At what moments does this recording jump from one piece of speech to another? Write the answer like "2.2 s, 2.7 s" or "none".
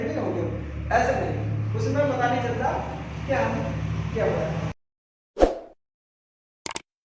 4.7 s